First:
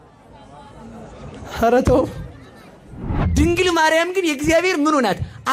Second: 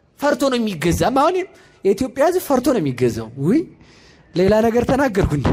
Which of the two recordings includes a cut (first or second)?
first